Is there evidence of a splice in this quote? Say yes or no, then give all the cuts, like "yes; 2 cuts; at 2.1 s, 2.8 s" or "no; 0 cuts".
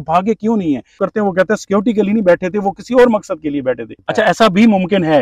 yes; 2 cuts; at 1.0 s, 3.9 s